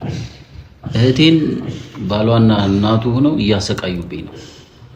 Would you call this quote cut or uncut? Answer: uncut